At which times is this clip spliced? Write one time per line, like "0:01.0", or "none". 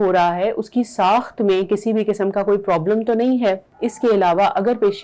0:03.7